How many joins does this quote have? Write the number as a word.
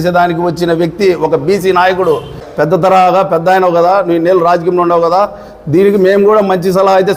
one